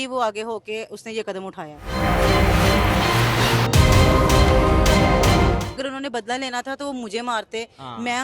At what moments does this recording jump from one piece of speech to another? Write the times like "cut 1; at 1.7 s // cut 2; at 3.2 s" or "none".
cut 1; at 1.8 s // cut 2; at 5.8 s